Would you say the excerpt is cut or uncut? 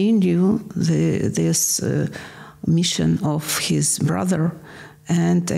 uncut